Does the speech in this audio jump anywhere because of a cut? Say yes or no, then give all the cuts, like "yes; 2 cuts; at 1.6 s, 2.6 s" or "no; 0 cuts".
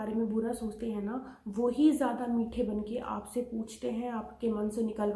no; 0 cuts